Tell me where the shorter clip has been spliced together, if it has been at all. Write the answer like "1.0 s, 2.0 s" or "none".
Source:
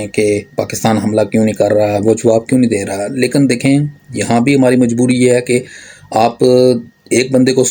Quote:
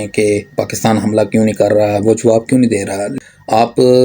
3.1 s